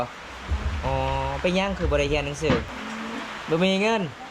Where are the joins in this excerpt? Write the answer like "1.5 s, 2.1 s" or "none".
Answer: 2.8 s